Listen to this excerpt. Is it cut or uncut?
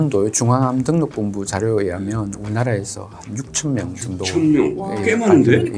uncut